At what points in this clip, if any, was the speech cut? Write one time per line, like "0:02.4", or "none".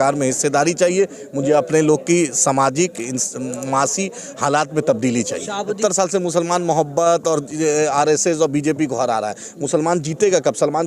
0:05.8